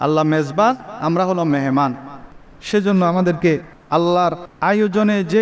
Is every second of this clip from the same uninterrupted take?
no; 2 cuts; at 3.7 s, 4.5 s

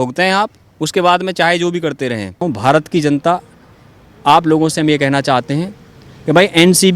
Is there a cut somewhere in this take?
yes; 1 cut; at 2.4 s

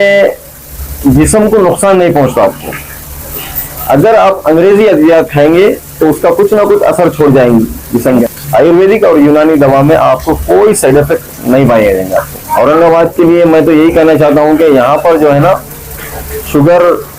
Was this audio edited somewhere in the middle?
yes; 2 cuts; at 8.2 s, 12.4 s

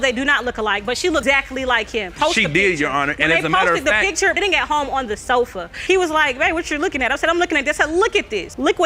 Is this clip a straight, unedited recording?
yes; 0 cuts

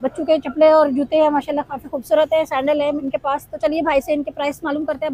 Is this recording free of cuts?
yes; 0 cuts

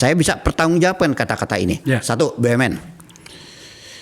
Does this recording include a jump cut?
no; 0 cuts

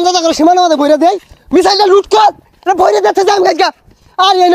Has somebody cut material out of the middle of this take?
no; 0 cuts

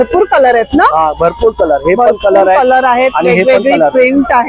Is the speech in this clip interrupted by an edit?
no; 0 cuts

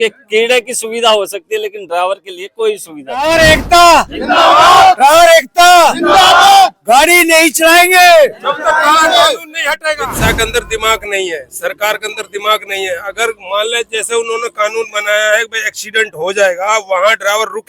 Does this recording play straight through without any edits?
no; 2 cuts; at 3.2 s, 10.1 s

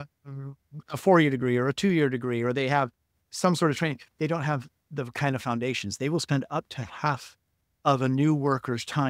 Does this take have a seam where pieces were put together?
no; 0 cuts

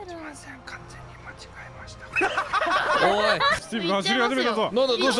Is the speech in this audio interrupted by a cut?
yes; 1 cut; at 3.6 s

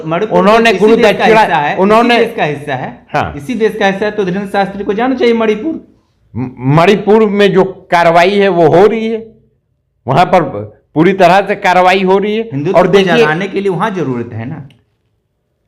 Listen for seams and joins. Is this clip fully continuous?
yes; 0 cuts

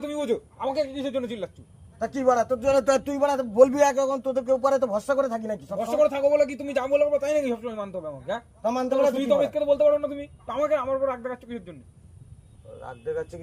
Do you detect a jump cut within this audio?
no; 0 cuts

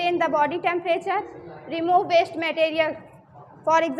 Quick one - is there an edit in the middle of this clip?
no; 0 cuts

